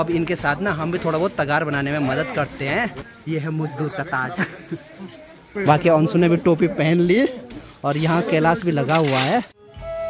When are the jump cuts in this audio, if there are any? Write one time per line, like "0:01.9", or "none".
none